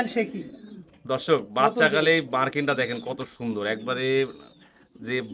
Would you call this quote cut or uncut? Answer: uncut